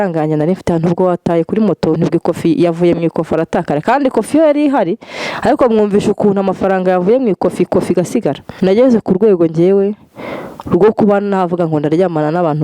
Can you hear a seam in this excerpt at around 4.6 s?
no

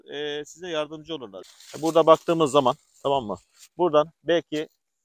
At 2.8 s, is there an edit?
no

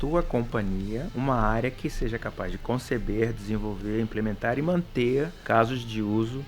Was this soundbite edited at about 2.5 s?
no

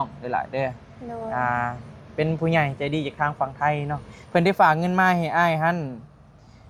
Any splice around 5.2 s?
no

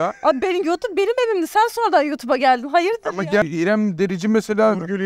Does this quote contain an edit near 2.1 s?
no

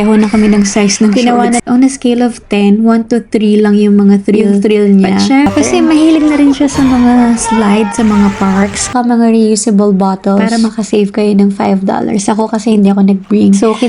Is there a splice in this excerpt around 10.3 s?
no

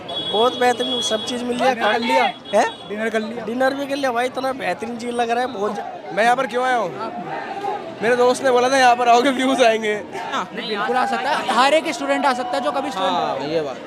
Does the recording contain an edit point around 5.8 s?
yes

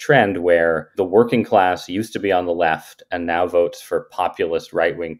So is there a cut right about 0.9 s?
yes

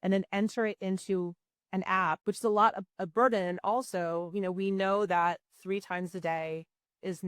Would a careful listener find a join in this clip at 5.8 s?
no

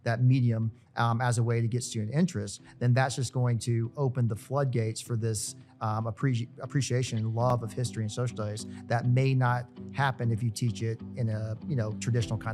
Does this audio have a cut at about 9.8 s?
no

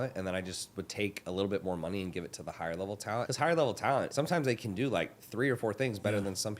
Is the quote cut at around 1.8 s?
no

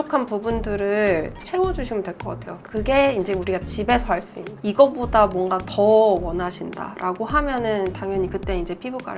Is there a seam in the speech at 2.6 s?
yes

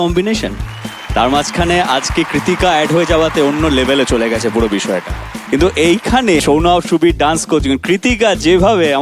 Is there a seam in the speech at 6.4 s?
yes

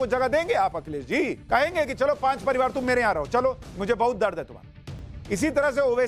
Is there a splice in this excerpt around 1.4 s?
yes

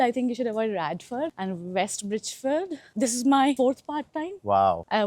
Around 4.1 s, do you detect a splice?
no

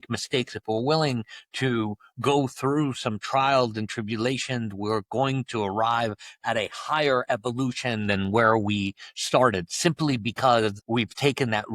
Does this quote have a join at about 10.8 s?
yes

